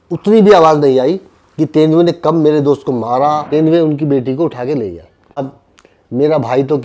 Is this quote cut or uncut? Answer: cut